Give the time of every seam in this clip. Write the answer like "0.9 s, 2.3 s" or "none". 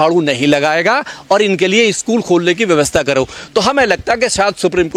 none